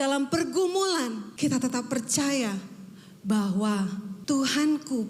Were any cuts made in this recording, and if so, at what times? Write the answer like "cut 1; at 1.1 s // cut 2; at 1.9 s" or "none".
cut 1; at 1.3 s // cut 2; at 4.1 s